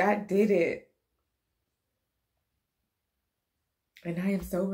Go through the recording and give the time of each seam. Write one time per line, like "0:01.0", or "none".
none